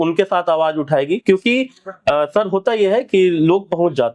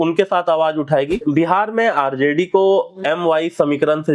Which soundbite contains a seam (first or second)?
second